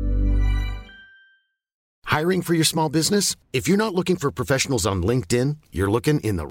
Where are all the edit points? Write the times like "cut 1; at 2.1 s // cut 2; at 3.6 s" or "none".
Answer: cut 1; at 1.9 s